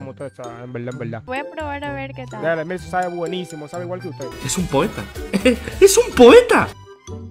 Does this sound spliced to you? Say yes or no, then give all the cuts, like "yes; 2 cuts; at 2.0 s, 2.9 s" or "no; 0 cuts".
yes; 1 cut; at 1.2 s